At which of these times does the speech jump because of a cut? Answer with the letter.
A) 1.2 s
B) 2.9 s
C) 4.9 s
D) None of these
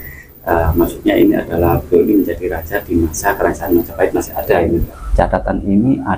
C